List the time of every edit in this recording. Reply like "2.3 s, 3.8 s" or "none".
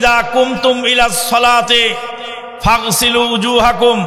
none